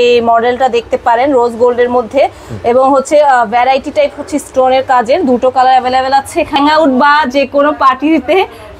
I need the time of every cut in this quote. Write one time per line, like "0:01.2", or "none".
0:06.5